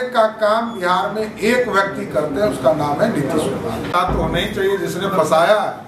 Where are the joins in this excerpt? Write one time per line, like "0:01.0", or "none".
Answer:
none